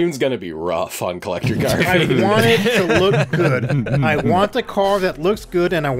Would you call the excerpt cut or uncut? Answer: uncut